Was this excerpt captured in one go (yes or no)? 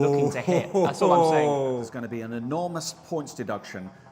no